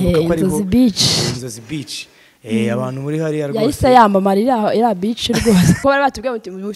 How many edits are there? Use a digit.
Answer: 1